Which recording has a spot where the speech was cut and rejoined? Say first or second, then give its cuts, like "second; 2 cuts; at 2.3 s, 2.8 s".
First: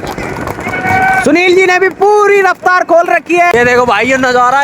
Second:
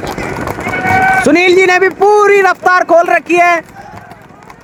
first; 1 cut; at 3.5 s